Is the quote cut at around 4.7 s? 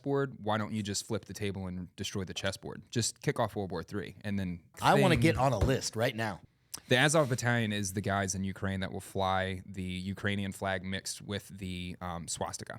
yes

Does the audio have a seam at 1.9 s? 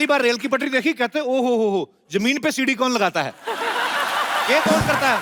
no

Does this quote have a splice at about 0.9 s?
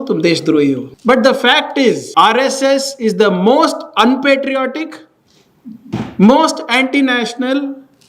yes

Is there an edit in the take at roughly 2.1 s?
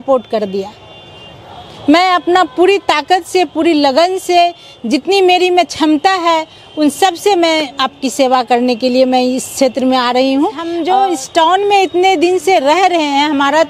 no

